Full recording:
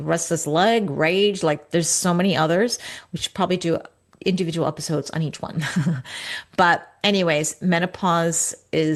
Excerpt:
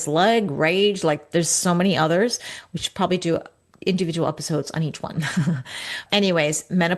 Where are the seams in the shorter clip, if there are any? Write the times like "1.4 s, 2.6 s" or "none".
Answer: 6.0 s